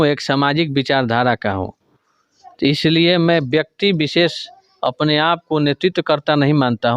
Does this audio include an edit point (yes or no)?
no